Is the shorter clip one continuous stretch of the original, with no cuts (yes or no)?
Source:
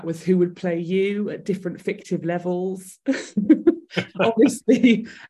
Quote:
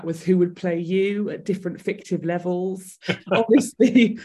no